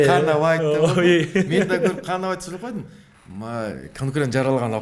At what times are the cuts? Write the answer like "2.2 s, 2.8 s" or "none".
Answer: none